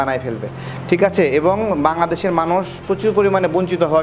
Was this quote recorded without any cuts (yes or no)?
yes